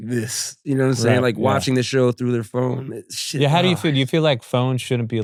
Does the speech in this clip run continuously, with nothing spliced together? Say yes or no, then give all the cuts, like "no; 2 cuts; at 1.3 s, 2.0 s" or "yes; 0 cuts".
yes; 0 cuts